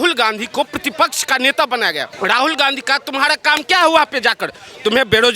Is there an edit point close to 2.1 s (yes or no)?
yes